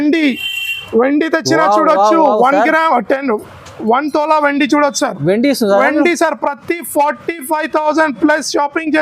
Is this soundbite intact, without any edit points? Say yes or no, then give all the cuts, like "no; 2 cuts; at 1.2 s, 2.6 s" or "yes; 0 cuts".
yes; 0 cuts